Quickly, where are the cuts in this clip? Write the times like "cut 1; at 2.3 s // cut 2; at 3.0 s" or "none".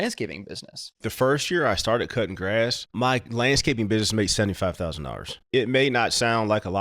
cut 1; at 1.0 s // cut 2; at 2.9 s // cut 3; at 5.4 s